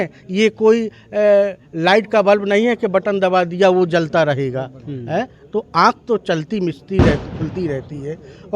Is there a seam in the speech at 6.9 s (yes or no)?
no